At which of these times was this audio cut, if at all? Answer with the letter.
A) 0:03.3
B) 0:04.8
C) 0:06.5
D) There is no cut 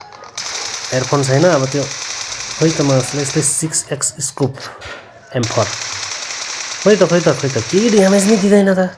D